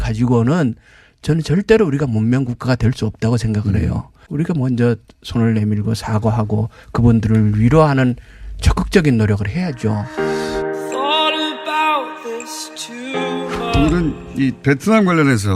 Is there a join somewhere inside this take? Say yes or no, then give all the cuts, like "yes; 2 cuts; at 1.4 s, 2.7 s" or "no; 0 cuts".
yes; 2 cuts; at 4.1 s, 10.0 s